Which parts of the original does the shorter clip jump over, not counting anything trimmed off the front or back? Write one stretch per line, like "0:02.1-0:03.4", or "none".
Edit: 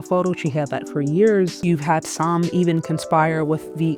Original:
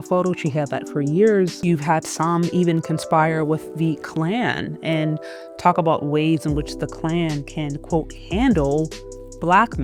none